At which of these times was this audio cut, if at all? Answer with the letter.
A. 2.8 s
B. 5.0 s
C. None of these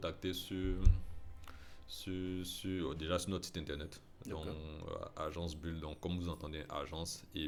C